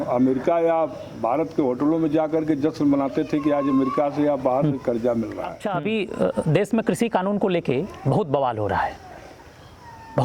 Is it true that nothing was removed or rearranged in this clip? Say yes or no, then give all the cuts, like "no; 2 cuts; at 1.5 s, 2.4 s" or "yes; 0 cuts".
no; 1 cut; at 5.6 s